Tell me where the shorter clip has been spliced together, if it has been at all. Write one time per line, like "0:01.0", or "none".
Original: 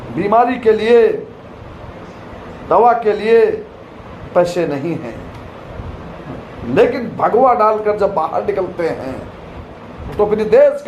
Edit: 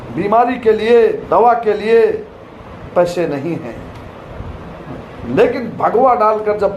0:01.2